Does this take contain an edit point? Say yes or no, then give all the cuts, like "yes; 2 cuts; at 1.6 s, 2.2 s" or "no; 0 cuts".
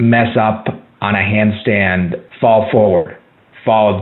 yes; 1 cut; at 2.2 s